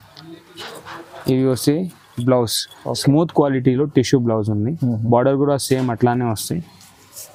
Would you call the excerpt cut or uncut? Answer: uncut